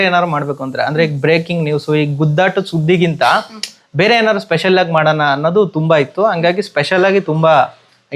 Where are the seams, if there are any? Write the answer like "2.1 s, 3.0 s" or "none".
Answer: none

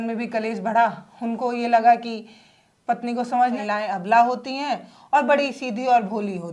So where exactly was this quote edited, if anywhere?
3.6 s

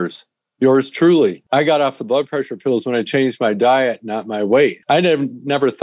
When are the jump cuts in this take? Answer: 1.4 s, 4.8 s

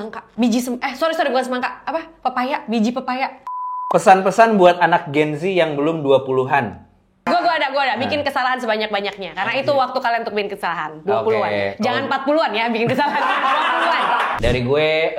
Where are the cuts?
3.5 s, 14.4 s

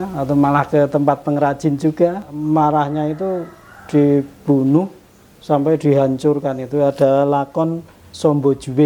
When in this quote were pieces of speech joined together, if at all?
2.3 s

